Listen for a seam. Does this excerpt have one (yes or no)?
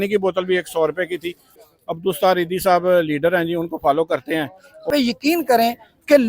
yes